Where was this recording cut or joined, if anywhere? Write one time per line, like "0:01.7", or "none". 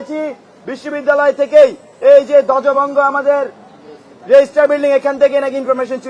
none